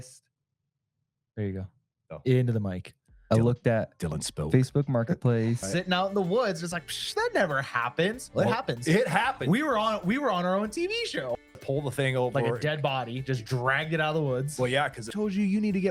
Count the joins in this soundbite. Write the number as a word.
three